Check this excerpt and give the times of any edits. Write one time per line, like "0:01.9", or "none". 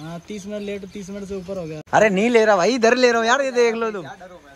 0:01.8